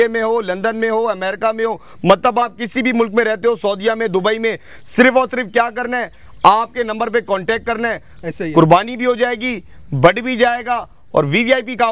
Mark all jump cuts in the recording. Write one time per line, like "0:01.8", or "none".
none